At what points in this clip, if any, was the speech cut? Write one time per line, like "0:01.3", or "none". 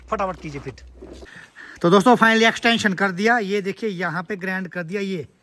0:01.2

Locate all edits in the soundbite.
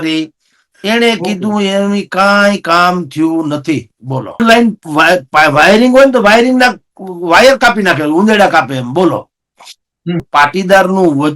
0:04.4
0:10.2

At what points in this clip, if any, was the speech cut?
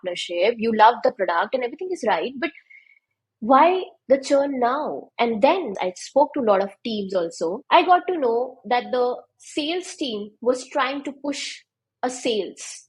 0:05.7
0:07.6

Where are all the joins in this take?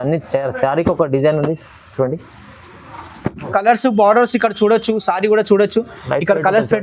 0:03.4

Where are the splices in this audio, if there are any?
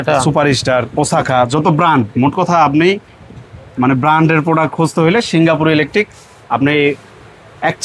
none

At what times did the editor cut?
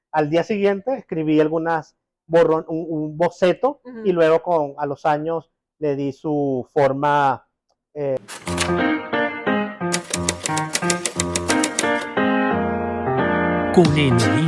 0:08.2

